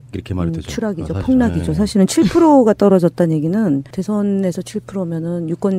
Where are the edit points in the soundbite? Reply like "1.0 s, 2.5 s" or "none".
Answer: none